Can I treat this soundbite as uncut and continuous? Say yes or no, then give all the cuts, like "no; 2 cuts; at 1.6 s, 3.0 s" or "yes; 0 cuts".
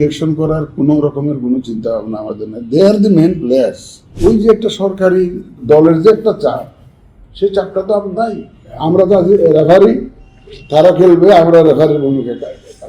no; 3 cuts; at 4.1 s, 5.6 s, 8.7 s